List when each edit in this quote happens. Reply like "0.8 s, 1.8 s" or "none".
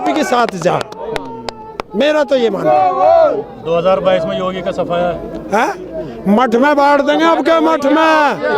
none